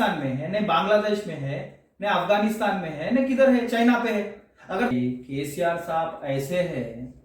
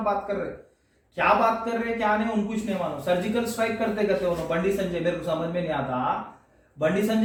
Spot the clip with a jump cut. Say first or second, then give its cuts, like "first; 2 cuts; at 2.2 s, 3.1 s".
first; 1 cut; at 4.9 s